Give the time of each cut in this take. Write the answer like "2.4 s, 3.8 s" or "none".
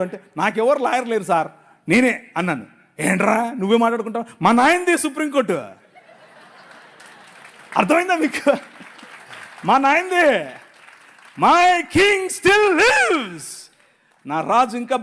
none